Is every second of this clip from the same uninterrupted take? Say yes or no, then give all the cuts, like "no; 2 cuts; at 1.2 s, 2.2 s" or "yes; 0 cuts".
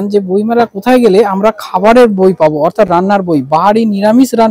yes; 0 cuts